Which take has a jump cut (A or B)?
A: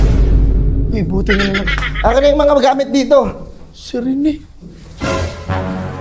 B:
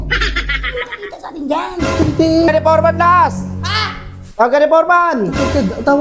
B